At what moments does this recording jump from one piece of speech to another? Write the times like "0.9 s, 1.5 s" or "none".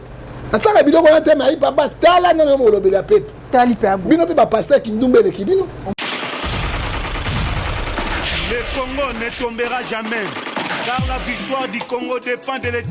5.9 s